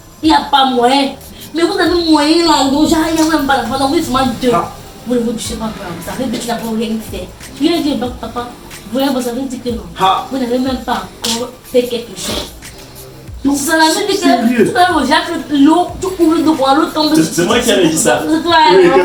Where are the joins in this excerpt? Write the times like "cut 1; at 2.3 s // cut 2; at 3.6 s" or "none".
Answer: none